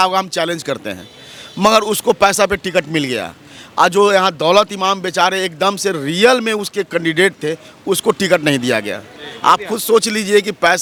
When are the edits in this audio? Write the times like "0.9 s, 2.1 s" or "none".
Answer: none